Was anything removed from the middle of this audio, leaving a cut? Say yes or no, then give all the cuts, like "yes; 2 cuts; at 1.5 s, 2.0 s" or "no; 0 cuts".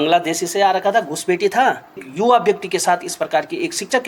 yes; 1 cut; at 2.1 s